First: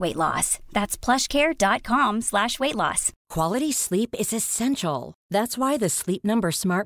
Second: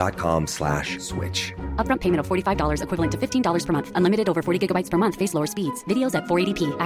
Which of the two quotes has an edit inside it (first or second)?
first